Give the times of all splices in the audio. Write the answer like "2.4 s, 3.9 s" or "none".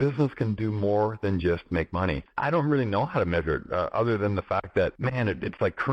2.3 s, 5.0 s